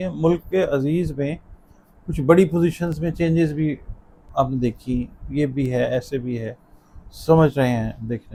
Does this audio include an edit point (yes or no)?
no